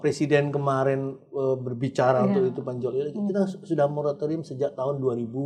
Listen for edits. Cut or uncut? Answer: uncut